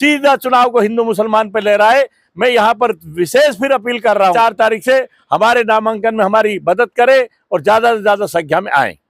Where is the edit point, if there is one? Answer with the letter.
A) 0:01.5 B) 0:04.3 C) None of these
B